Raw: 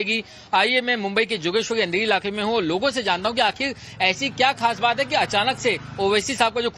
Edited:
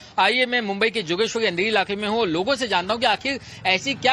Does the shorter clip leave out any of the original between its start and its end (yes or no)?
no